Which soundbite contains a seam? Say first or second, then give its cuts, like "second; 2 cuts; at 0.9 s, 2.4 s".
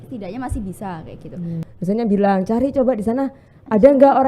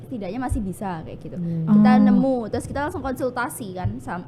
first; 1 cut; at 1.6 s